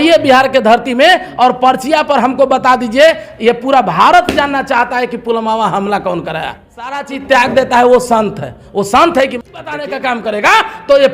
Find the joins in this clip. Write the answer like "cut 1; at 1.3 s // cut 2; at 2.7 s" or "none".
cut 1; at 7.0 s // cut 2; at 9.9 s

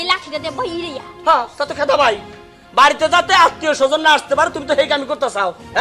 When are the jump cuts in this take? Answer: none

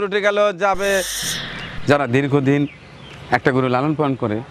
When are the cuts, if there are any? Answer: cut 1; at 1.2 s

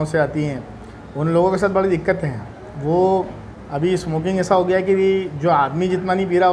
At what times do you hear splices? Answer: none

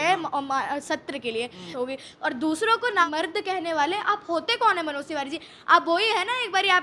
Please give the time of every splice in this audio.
cut 1; at 1.7 s // cut 2; at 3.0 s

